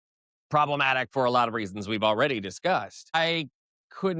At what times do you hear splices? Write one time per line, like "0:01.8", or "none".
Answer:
0:03.0